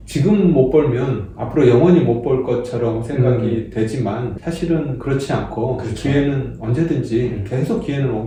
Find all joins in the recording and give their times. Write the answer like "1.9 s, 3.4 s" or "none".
none